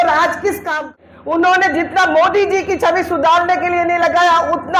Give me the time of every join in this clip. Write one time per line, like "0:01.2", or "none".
0:00.9